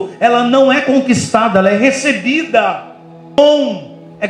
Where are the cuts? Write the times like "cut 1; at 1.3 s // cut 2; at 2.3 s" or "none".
cut 1; at 3.4 s